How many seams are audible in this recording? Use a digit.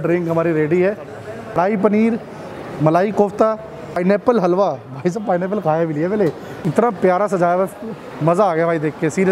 3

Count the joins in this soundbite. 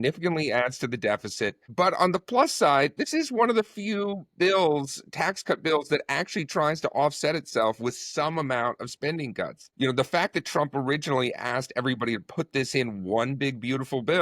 2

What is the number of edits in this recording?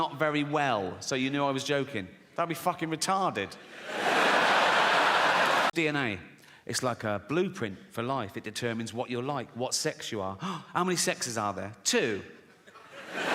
1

